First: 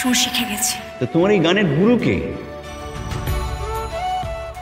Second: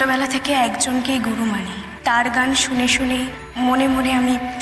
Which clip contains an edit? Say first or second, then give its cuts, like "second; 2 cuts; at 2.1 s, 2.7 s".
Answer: second; 2 cuts; at 1.8 s, 3.4 s